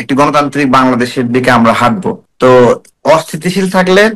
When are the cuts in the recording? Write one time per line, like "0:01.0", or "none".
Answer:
0:02.2
0:02.9